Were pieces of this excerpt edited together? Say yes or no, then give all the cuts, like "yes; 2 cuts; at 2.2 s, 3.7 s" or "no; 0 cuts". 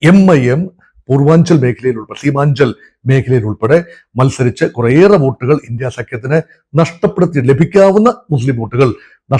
no; 0 cuts